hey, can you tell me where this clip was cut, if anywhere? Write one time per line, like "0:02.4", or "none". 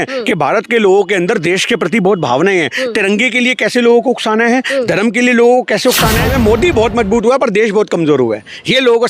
0:06.3